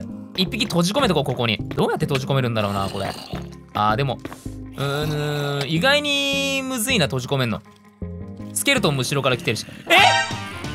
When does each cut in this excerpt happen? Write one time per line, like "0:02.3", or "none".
0:01.7